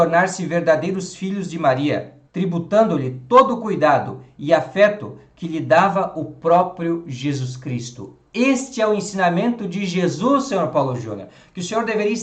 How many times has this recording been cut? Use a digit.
1